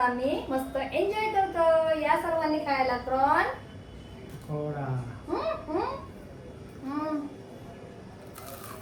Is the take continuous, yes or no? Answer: yes